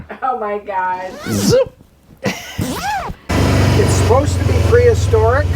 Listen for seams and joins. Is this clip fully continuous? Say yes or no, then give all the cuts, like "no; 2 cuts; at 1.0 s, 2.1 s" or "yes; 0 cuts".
no; 1 cut; at 3.3 s